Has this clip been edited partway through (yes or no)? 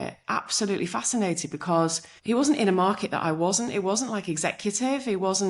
yes